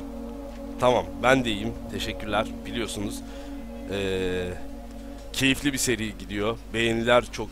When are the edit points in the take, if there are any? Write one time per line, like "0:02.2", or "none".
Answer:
0:03.6